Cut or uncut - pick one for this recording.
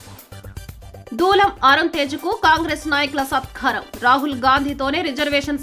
uncut